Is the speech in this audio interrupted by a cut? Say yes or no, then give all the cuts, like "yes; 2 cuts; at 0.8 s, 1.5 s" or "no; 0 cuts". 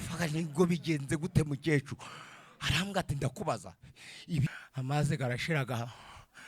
yes; 1 cut; at 4.4 s